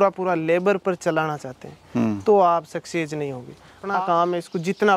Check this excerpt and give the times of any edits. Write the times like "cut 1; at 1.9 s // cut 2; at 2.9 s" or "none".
cut 1; at 3.8 s